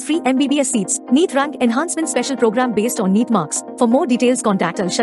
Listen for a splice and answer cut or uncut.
uncut